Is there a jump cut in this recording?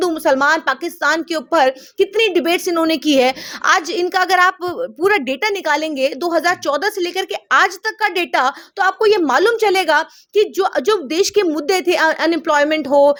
no; 0 cuts

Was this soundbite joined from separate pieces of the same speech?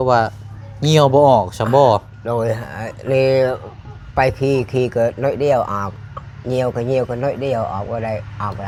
no; 0 cuts

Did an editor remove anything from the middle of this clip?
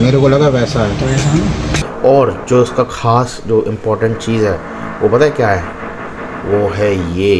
yes; 1 cut; at 1.8 s

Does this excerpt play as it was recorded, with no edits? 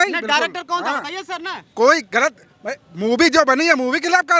yes; 0 cuts

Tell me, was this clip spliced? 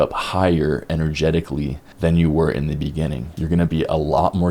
yes; 2 cuts; at 1.8 s, 3.3 s

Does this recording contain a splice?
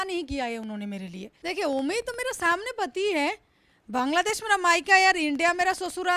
yes; 1 cut; at 1.3 s

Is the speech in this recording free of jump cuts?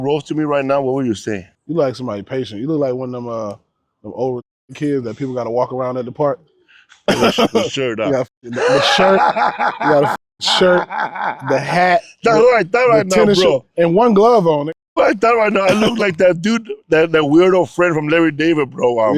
no; 1 cut; at 1.5 s

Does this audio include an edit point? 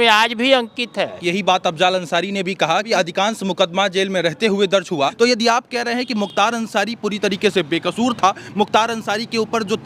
yes; 3 cuts; at 1.2 s, 2.9 s, 5.1 s

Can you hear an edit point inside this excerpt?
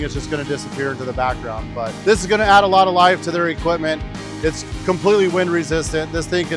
no; 0 cuts

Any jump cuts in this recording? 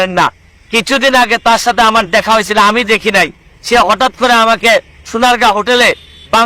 no; 0 cuts

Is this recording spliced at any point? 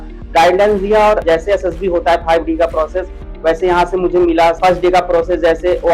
yes; 2 cuts; at 1.2 s, 4.6 s

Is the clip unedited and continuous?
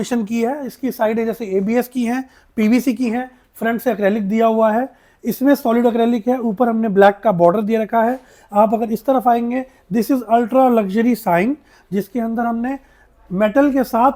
yes; 0 cuts

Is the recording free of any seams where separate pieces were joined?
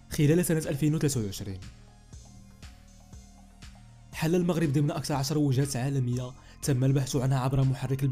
yes; 0 cuts

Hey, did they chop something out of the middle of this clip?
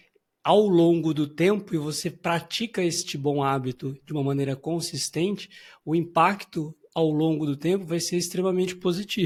no; 0 cuts

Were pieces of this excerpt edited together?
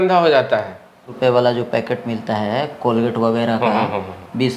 yes; 1 cut; at 1.1 s

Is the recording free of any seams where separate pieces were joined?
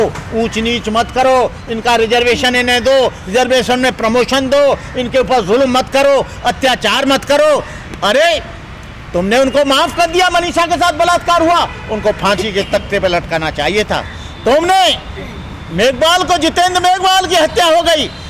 yes; 0 cuts

